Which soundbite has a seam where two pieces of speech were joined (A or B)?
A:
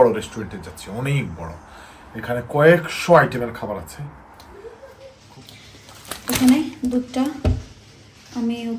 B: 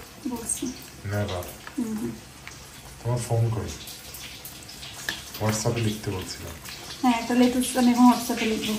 A